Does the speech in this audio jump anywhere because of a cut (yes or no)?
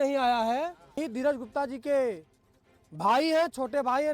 yes